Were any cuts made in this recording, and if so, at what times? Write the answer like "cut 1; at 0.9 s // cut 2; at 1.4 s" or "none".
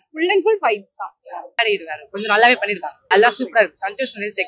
cut 1; at 1.5 s // cut 2; at 2.9 s